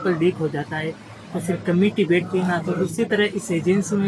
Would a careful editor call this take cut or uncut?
uncut